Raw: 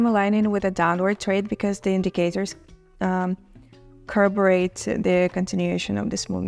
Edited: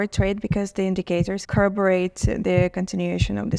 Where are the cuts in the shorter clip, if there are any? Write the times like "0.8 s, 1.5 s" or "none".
1.4 s